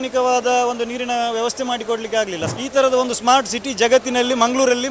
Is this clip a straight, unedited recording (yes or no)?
no